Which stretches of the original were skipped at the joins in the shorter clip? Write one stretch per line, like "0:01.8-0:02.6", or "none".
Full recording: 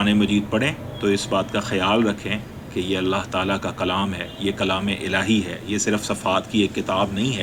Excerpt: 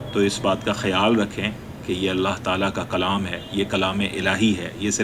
none